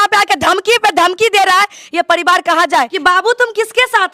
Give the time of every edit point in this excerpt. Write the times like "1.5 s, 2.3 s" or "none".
2.9 s

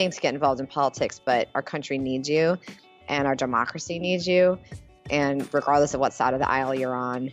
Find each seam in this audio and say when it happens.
none

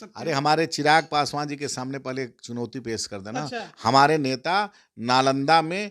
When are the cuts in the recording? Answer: none

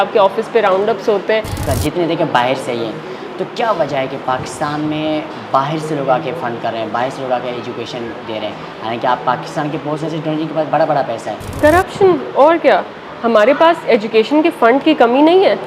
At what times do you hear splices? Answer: 1.7 s, 11.4 s

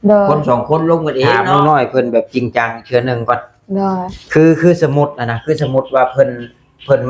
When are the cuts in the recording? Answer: 1.4 s

